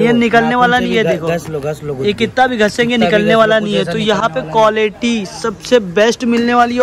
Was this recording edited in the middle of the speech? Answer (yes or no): no